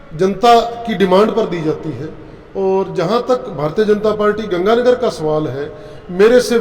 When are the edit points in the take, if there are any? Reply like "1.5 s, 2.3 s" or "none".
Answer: none